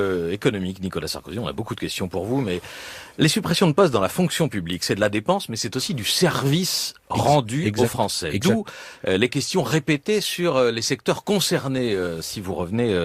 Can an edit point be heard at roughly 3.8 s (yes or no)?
no